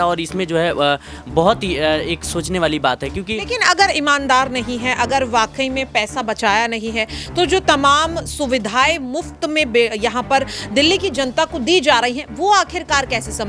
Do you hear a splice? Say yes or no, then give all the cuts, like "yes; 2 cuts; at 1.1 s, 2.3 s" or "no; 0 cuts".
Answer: no; 0 cuts